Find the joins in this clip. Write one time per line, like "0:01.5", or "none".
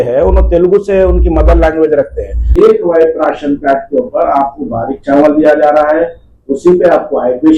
0:02.6

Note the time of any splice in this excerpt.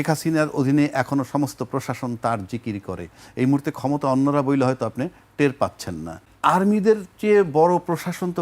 0:06.3

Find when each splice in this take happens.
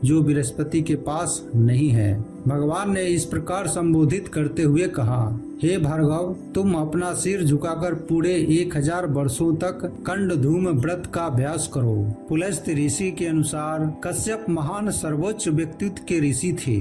0:12.1

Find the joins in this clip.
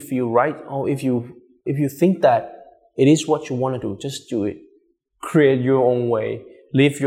0:01.4

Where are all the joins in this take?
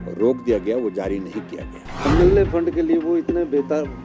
0:02.0

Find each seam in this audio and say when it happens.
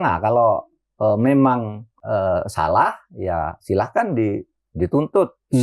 0:01.9

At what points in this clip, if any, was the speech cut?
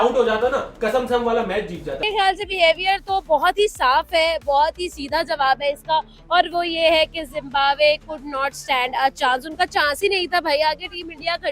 0:01.9

